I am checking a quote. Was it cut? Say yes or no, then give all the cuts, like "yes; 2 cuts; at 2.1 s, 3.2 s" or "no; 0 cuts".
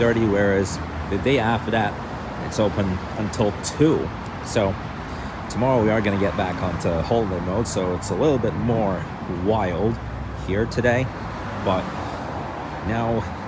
no; 0 cuts